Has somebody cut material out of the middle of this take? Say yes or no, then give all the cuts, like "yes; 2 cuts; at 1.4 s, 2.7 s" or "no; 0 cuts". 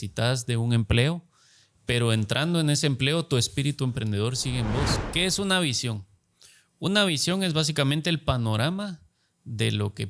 yes; 1 cut; at 5.0 s